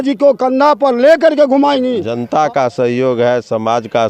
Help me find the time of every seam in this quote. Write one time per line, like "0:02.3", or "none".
0:02.0